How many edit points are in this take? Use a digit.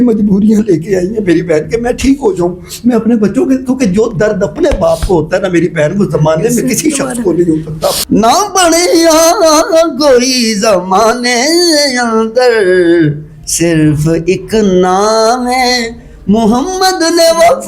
1